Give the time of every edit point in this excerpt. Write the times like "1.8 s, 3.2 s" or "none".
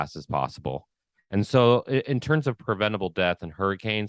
none

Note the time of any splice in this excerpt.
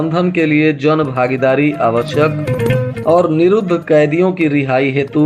none

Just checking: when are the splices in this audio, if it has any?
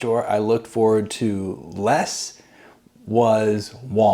none

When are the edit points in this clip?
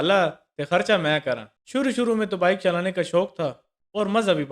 1.5 s

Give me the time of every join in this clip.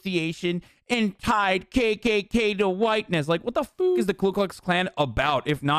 none

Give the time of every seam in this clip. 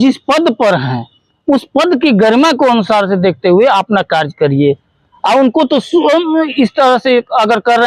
none

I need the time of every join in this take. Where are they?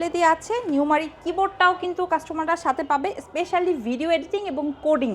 none

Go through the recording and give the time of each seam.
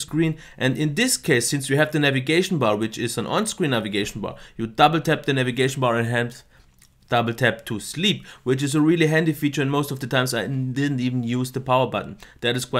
none

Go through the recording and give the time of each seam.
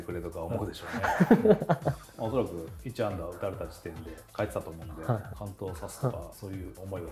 2.1 s

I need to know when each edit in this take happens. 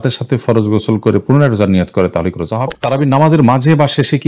2.7 s

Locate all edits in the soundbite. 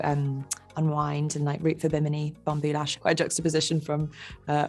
2.9 s

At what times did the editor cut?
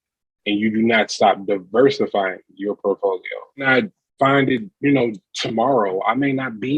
3.7 s

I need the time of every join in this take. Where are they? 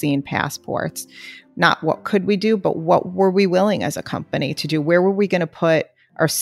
none

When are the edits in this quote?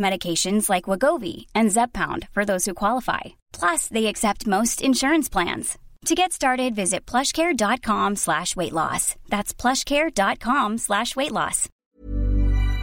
11.8 s

